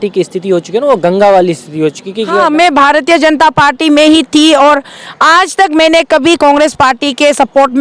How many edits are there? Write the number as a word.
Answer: one